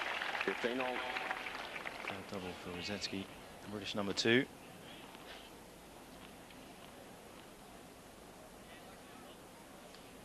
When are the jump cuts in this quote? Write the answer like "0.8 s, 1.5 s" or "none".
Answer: 1.9 s